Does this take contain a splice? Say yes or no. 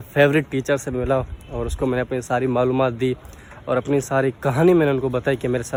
no